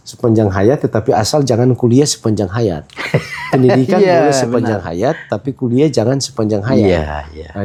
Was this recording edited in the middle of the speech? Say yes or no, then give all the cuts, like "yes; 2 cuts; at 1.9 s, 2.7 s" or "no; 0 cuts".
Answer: no; 0 cuts